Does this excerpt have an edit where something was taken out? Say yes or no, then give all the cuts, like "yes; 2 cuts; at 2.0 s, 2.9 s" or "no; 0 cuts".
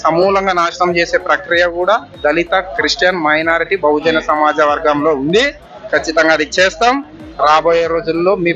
no; 0 cuts